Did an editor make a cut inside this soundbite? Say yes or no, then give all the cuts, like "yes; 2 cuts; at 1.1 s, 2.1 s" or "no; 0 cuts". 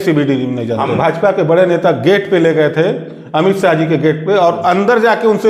yes; 1 cut; at 0.9 s